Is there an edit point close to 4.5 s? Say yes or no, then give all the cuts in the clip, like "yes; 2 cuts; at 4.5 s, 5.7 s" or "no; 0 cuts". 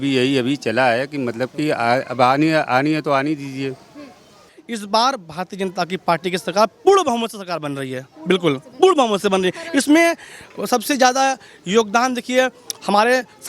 yes; 1 cut; at 4.5 s